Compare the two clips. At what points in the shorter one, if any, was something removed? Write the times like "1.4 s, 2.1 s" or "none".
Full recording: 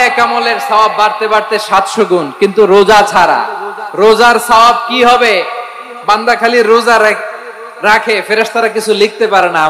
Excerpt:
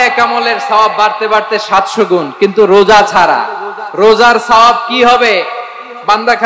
none